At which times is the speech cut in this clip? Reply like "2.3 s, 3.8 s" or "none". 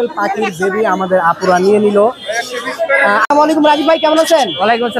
3.2 s